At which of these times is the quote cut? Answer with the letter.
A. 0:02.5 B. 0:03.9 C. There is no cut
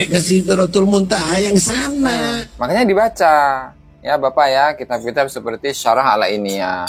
A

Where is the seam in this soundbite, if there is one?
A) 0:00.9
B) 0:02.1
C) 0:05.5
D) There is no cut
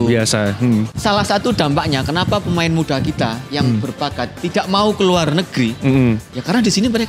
A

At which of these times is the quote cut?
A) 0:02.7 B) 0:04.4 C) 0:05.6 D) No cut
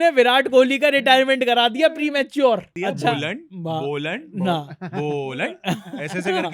A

